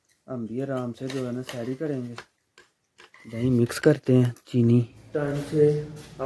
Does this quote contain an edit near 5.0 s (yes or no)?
yes